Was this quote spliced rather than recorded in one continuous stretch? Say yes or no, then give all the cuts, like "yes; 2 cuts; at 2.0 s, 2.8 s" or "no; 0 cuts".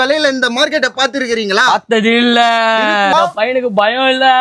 yes; 1 cut; at 3.1 s